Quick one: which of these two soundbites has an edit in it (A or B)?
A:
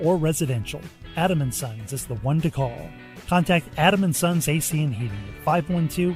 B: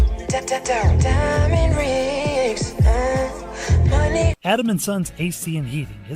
B